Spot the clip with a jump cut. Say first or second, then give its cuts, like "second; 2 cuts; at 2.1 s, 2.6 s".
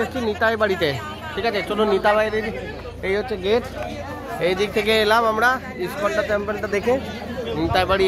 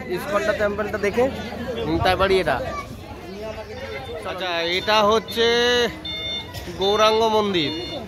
second; 1 cut; at 4.1 s